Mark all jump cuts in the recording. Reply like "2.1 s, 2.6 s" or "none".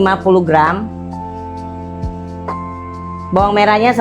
1.4 s, 3.3 s

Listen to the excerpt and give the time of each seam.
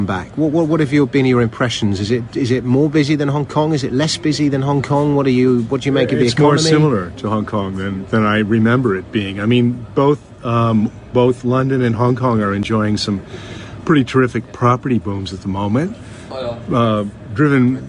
none

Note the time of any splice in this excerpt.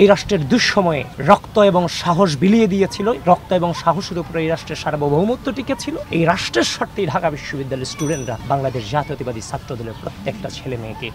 1.1 s, 6.0 s, 8.4 s

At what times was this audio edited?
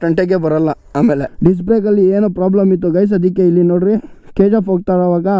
1.3 s

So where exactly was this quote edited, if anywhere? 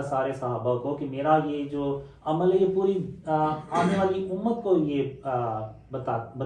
none

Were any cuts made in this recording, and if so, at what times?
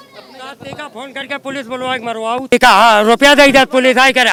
none

